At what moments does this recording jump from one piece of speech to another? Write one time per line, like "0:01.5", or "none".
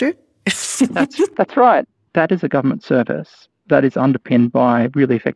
0:02.0